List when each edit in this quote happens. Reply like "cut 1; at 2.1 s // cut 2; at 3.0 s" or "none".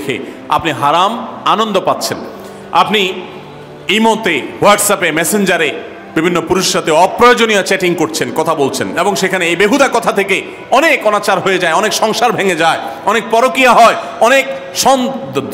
none